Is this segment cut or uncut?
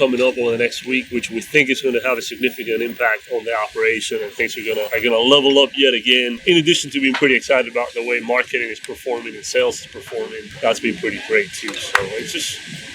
cut